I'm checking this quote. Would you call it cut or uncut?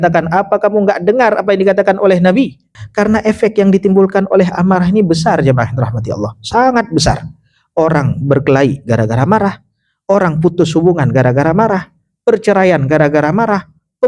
cut